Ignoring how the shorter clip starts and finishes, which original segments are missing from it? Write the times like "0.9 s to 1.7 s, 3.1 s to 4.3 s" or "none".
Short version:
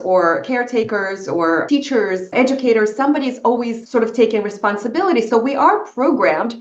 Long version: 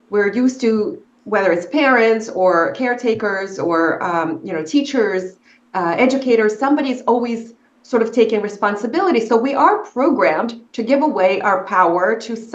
4.0 s to 5.3 s, 7.4 s to 7.8 s